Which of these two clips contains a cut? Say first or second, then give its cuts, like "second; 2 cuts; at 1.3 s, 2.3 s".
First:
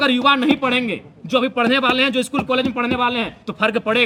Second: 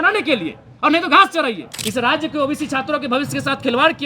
second; 1 cut; at 1.7 s